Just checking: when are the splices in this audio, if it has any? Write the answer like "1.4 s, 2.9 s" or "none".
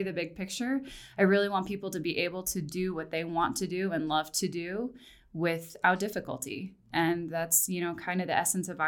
none